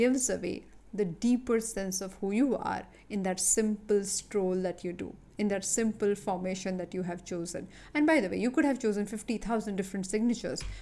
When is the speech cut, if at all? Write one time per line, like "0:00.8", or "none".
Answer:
none